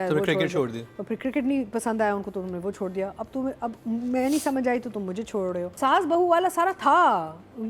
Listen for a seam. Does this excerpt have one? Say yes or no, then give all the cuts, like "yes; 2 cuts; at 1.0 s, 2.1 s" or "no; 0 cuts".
yes; 1 cut; at 5.7 s